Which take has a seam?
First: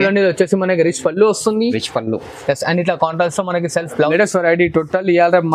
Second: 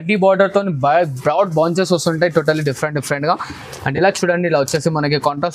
first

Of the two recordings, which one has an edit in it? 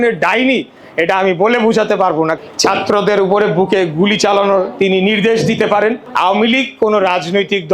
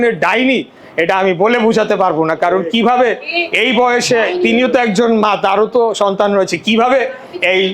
first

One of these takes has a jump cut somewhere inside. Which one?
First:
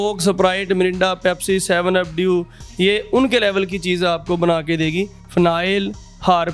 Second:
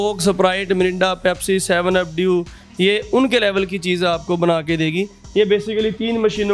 first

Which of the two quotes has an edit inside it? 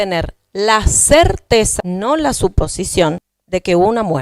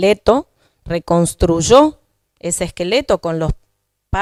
first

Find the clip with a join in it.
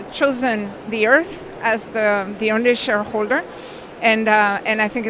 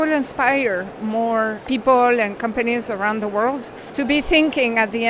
second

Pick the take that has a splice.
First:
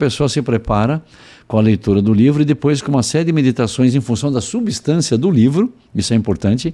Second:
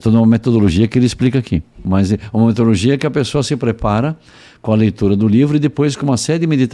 second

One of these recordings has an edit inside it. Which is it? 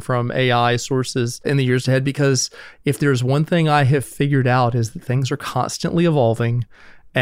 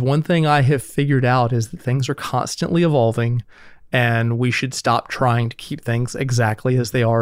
first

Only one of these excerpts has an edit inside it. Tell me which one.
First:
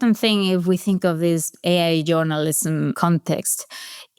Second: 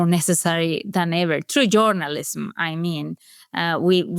first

